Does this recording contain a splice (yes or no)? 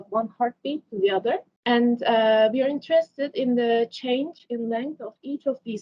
yes